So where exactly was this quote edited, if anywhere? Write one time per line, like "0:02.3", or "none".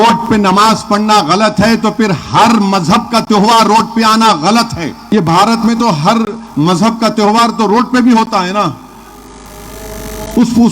0:05.0